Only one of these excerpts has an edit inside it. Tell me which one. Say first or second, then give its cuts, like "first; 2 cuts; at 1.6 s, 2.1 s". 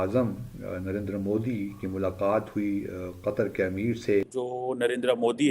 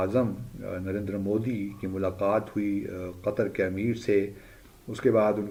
first; 1 cut; at 4.4 s